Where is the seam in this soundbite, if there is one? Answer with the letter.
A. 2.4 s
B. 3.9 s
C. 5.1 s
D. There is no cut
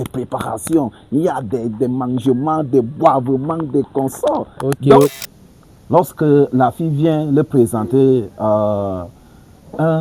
C